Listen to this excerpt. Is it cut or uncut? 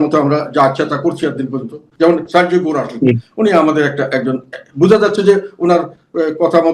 cut